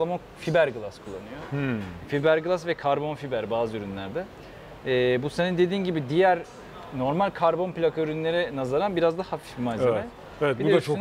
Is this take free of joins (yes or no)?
yes